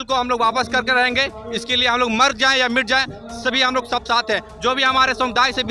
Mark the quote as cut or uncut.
uncut